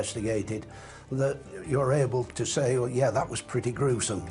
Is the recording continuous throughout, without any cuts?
no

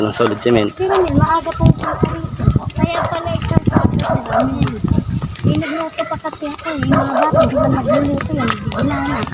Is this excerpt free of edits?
yes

